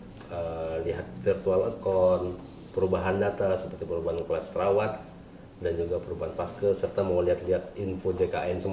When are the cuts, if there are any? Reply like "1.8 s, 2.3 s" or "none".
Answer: none